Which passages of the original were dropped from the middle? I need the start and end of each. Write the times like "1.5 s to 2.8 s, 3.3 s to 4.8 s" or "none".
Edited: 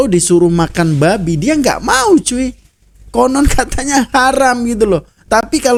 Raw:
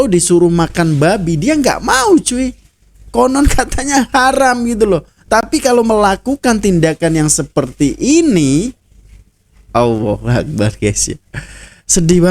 none